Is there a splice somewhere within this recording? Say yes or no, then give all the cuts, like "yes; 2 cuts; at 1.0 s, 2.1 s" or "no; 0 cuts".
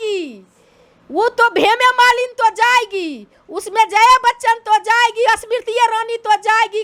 no; 0 cuts